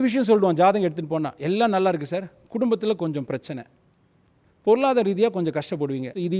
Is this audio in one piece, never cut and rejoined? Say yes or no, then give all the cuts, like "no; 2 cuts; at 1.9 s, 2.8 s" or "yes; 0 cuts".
yes; 0 cuts